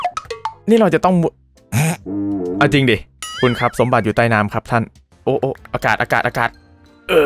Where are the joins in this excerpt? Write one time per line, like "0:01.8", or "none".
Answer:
0:05.0